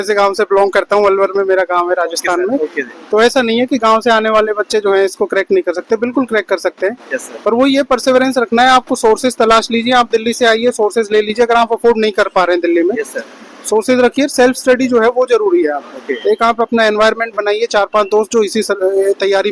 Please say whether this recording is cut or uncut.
uncut